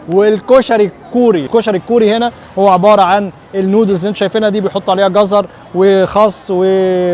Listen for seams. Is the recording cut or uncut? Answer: cut